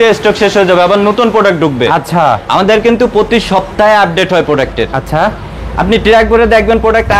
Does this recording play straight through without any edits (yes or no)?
yes